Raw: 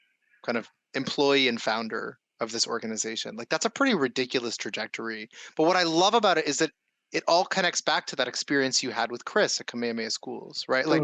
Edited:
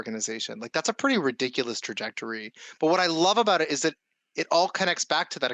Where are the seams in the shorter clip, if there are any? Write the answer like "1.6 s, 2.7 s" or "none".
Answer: none